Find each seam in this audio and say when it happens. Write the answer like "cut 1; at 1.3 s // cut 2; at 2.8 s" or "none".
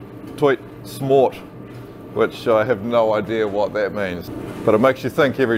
cut 1; at 4.2 s